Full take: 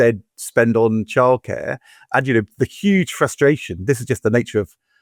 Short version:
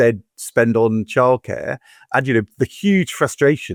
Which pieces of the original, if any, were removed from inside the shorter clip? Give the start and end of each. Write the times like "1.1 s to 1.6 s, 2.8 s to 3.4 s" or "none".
none